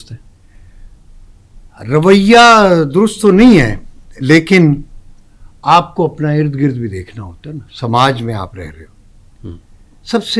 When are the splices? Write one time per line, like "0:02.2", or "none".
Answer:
none

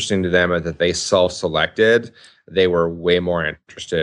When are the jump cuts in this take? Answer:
none

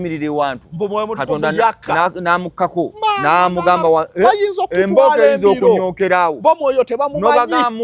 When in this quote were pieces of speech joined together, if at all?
none

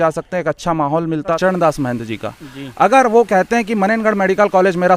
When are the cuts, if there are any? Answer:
0:01.4

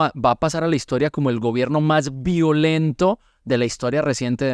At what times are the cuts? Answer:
none

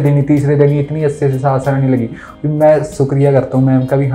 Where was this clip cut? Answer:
0:02.2

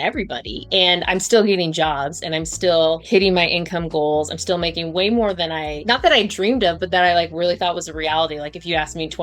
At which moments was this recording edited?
0:03.0
0:05.7

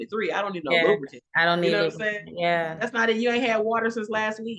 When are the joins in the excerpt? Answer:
none

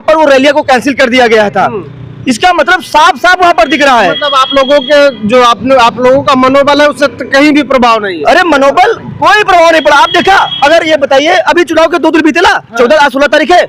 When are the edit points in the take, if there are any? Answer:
none

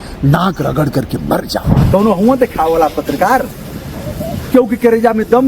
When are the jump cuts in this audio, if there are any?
0:01.8

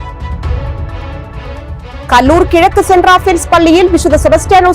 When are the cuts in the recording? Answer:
0:01.2

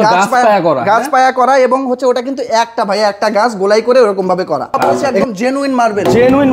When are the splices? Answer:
0:04.8

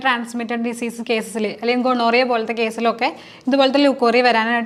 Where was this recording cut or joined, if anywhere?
none

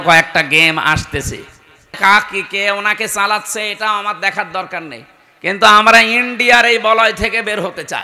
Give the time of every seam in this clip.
0:01.9

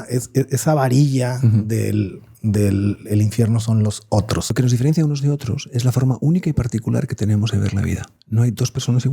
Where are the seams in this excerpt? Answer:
0:04.5

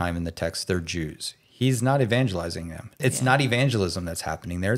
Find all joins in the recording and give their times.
0:02.8

